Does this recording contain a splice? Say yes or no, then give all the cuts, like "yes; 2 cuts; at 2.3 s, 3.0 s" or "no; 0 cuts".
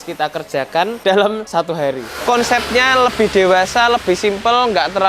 yes; 2 cuts; at 0.9 s, 1.9 s